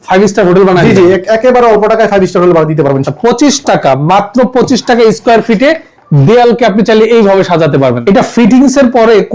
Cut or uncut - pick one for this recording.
cut